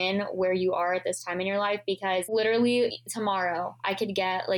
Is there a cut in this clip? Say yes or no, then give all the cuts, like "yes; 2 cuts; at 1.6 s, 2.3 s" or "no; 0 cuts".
no; 0 cuts